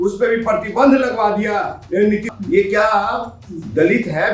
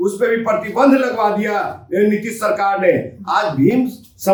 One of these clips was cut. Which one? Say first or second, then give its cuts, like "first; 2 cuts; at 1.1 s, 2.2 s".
first; 1 cut; at 2.3 s